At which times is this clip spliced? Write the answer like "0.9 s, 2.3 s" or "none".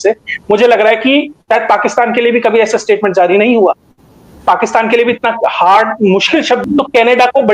6.6 s